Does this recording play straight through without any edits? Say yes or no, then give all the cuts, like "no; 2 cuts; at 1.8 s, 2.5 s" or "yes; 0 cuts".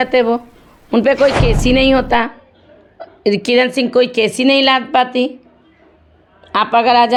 yes; 0 cuts